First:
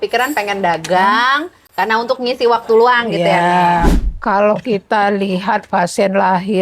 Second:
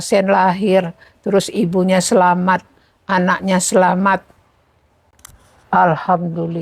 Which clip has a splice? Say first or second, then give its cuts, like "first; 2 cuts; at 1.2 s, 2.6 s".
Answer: first; 1 cut; at 3.9 s